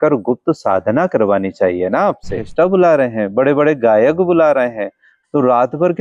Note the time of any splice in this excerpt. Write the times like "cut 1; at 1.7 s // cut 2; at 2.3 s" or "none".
cut 1; at 2.4 s